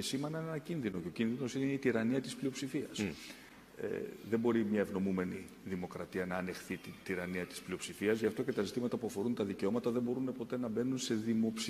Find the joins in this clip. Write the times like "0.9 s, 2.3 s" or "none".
none